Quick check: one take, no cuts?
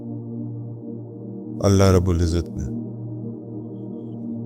no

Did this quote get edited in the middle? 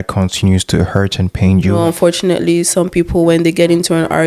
yes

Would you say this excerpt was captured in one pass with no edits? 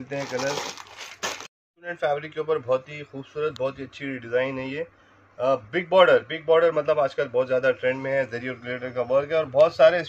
no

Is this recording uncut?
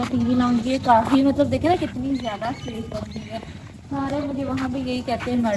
yes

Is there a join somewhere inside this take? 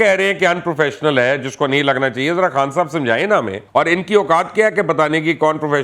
yes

